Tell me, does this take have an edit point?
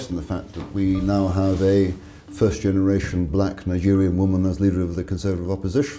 no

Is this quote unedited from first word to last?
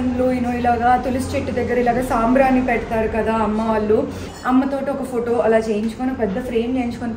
no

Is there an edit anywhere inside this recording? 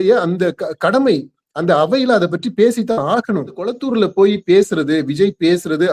yes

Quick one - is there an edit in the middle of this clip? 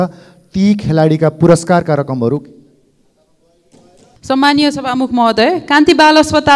no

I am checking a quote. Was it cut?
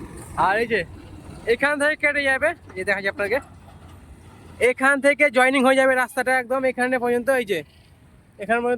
no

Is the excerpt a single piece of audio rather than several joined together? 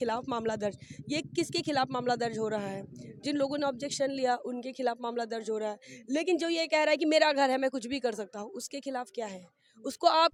yes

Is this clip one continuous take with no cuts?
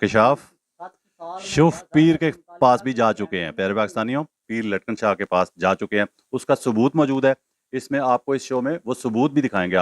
no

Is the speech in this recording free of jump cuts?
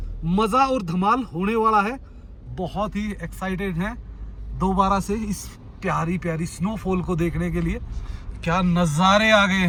yes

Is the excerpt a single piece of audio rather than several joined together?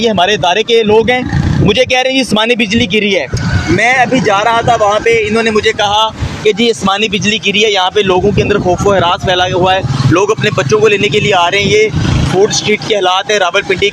yes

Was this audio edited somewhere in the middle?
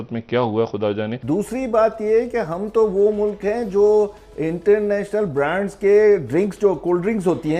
yes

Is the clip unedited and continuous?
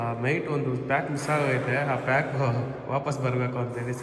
yes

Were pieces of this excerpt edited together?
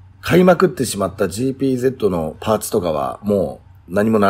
no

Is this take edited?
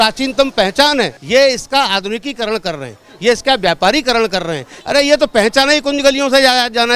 yes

